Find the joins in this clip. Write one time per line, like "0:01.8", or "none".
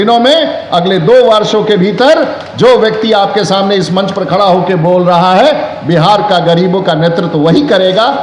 none